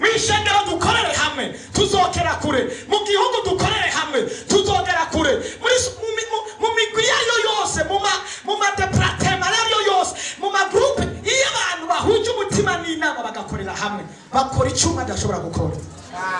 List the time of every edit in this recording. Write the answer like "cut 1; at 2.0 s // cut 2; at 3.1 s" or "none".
none